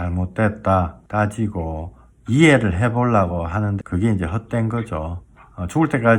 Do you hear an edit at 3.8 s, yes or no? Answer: yes